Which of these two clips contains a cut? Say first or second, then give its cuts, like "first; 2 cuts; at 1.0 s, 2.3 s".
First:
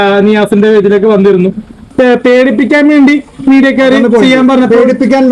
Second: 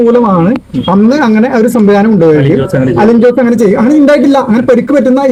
first; 1 cut; at 1.8 s